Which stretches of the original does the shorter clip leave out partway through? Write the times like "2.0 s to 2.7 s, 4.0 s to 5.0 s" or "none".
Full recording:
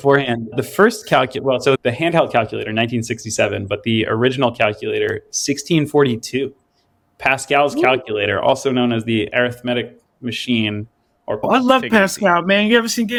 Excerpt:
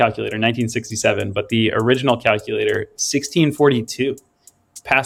none